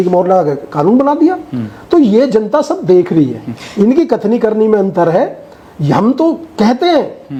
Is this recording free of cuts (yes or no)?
yes